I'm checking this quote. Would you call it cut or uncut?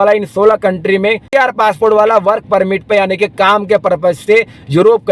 cut